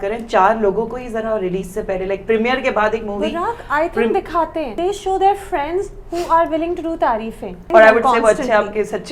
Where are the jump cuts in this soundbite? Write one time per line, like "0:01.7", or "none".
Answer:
0:04.7
0:07.5